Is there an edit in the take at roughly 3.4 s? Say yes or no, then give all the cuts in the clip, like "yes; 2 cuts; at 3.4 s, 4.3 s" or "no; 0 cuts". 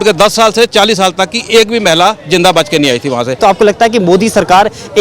yes; 1 cut; at 3.4 s